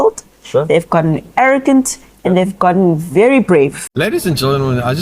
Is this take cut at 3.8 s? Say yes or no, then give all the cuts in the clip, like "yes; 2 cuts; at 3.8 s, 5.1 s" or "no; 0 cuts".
yes; 1 cut; at 3.8 s